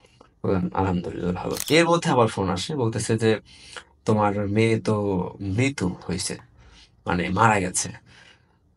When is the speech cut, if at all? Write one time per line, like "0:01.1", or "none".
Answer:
0:01.6